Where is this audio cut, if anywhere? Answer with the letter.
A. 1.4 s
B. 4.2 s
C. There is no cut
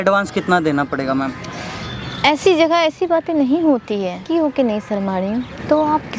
B